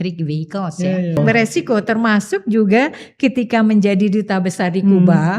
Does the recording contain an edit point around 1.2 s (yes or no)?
yes